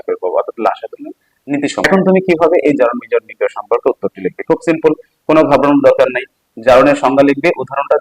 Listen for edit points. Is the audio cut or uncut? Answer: cut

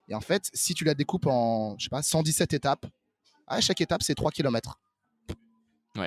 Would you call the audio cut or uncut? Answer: uncut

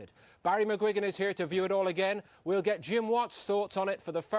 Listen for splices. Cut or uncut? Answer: cut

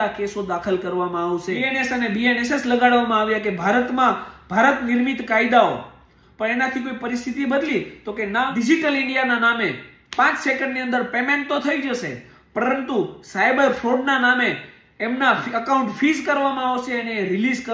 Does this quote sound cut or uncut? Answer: cut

